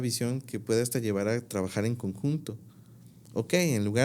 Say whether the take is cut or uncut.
uncut